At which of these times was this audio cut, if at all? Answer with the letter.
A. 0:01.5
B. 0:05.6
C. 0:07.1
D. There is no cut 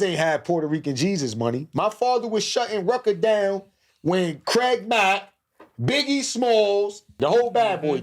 C